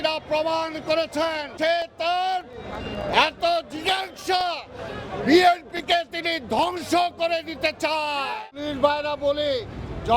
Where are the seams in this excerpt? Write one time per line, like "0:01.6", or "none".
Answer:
0:01.5
0:08.6